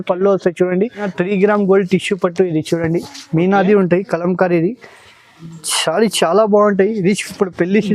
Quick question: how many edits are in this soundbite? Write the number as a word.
one